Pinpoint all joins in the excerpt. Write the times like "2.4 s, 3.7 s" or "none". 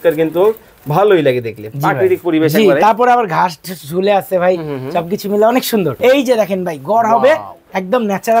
5.9 s